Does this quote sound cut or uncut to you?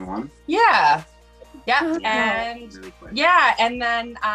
uncut